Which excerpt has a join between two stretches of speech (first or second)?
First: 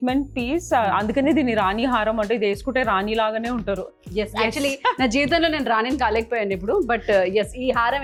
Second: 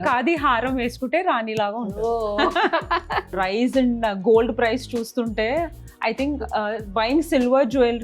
second